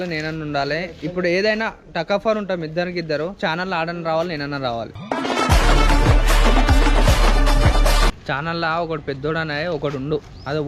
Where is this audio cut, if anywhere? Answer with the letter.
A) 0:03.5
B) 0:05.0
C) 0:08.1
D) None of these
C